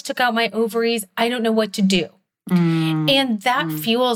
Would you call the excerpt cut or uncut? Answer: uncut